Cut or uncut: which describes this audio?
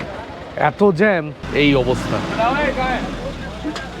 cut